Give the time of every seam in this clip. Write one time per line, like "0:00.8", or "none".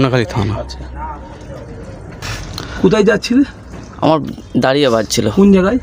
none